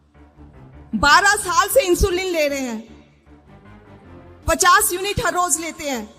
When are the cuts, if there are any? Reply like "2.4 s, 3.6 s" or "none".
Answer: 0.9 s, 3.0 s, 4.5 s